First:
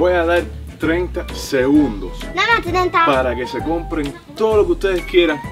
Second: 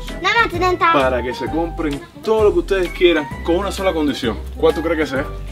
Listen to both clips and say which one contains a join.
second; 1 cut; at 4.5 s

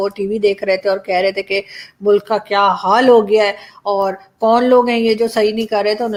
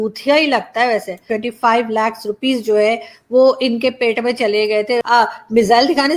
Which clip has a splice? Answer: second; 2 cuts; at 1.2 s, 5.0 s

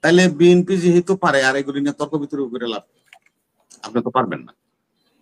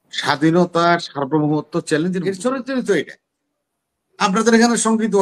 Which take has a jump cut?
second; 1 cut; at 2.2 s

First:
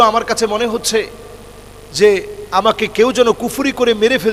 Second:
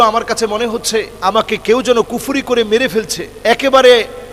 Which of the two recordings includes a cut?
second; 2 cuts; at 1.1 s, 3.2 s

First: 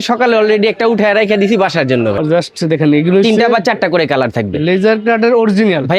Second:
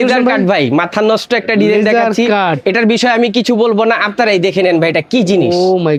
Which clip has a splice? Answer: first; 1 cut; at 2.2 s

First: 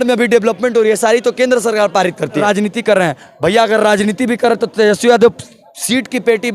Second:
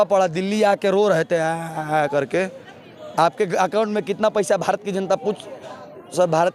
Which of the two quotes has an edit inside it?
first; 1 cut; at 2.4 s

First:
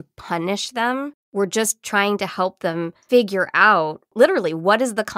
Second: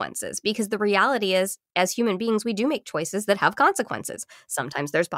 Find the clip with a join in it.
first; 3 cuts; at 1.2 s, 3.0 s, 4.0 s

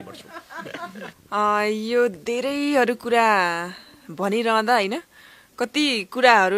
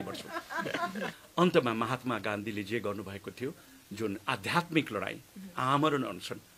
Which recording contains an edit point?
second; 1 cut; at 1.2 s

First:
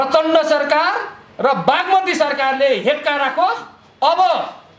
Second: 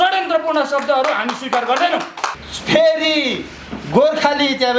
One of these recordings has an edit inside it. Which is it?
second; 1 cut; at 2.4 s

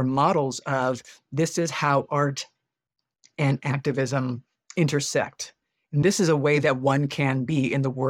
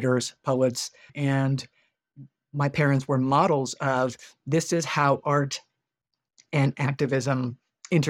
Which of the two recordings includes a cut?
second; 1 cut; at 0.9 s

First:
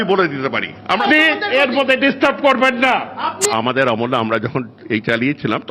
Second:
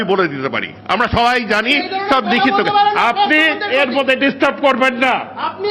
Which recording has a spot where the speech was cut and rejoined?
first; 2 cuts; at 1.1 s, 3.5 s

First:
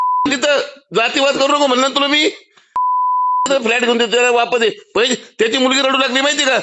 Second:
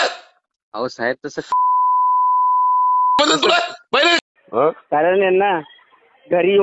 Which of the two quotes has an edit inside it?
second; 1 cut; at 4.2 s

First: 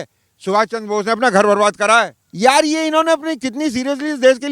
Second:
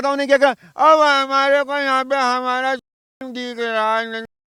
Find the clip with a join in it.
first; 1 cut; at 2.2 s

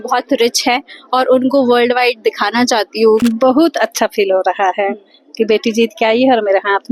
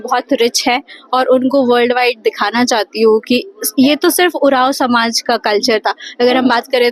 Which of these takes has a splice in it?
first; 1 cut; at 3.2 s

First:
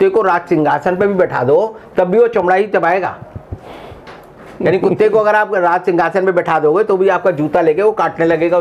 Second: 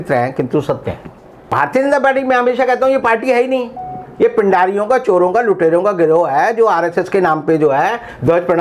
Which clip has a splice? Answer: second; 1 cut; at 1.4 s

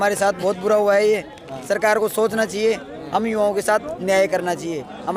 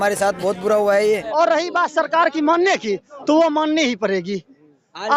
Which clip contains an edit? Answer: second; 1 cut; at 1.3 s

